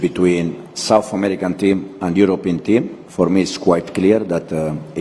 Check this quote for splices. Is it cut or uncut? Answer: uncut